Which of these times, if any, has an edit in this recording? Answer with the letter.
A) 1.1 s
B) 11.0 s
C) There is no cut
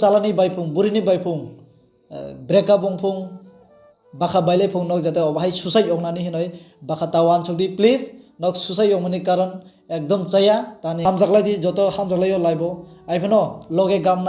B